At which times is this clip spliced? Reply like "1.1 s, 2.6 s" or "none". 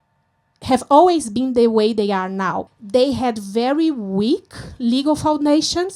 2.7 s